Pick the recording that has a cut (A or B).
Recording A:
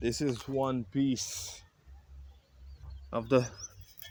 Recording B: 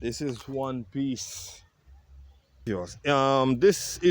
B